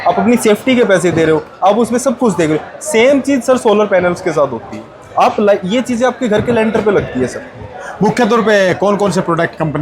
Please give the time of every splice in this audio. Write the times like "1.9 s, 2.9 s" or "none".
none